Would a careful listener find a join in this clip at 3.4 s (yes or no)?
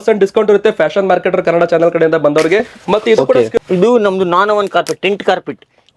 yes